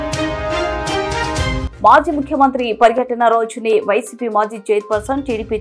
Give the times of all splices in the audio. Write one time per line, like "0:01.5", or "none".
none